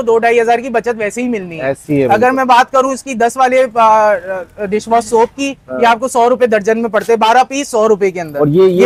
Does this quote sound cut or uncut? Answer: uncut